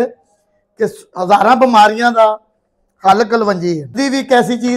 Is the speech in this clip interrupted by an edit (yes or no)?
no